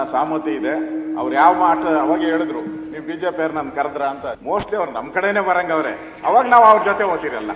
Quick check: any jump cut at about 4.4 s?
yes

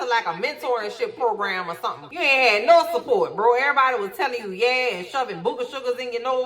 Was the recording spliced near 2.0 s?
yes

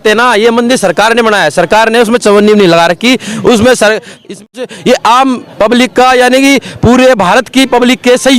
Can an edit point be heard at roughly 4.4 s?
yes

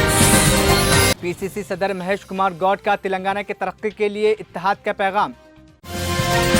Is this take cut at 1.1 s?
yes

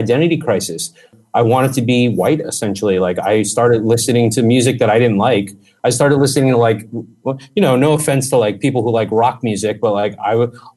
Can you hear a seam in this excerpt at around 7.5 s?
no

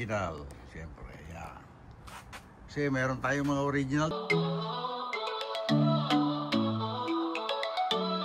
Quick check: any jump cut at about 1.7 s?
no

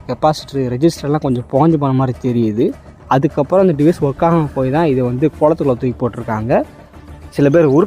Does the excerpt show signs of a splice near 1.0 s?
no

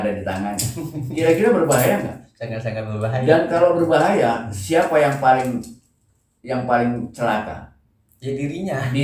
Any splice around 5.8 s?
no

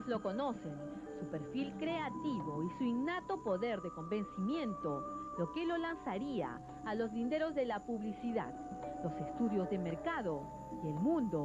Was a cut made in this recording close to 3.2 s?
no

